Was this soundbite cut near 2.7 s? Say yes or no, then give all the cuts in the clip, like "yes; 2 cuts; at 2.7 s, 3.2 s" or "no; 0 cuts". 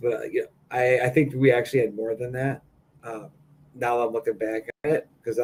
no; 0 cuts